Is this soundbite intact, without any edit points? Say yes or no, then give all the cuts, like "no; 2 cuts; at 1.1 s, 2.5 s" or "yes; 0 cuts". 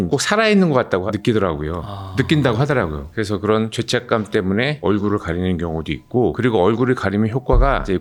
yes; 0 cuts